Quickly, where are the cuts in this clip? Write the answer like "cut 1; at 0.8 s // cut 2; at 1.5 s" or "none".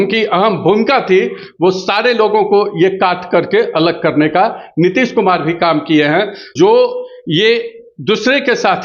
cut 1; at 6.5 s

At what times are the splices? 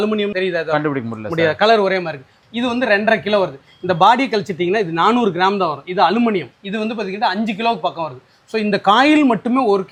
none

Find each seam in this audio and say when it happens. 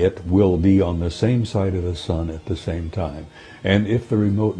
none

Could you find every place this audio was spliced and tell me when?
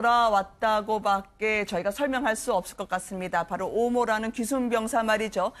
cut 1; at 2.8 s

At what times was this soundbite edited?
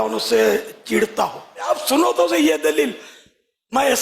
cut 1; at 1.7 s

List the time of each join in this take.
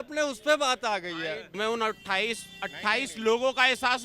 cut 1; at 1.5 s

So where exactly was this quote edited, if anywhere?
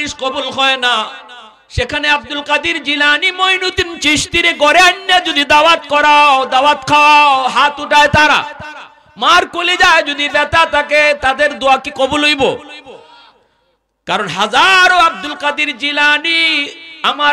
none

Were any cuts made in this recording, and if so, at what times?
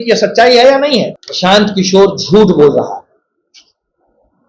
cut 1; at 1.2 s

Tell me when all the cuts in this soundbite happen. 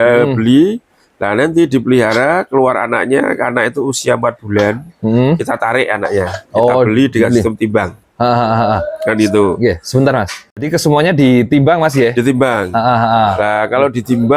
none

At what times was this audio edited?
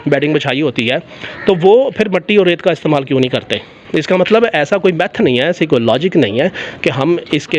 none

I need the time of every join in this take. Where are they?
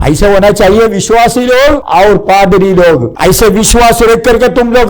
cut 1; at 1.8 s // cut 2; at 3.1 s

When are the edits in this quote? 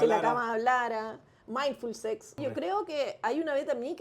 cut 1; at 2.4 s

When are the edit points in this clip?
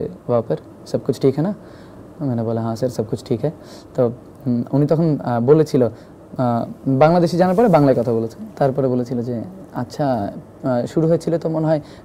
none

